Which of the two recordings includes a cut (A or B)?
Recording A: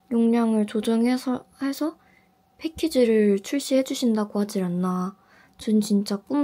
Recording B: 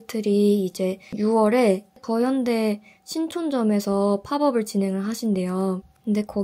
B